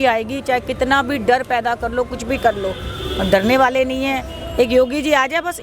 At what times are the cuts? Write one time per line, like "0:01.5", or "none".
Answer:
none